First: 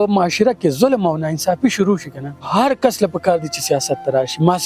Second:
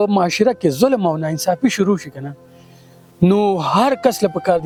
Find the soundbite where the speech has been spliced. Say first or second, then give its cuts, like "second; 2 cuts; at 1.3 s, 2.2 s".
first; 1 cut; at 2.4 s